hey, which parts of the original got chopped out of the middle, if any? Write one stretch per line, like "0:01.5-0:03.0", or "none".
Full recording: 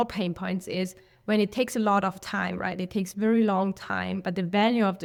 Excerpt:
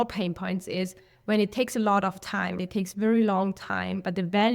0:02.6-0:02.8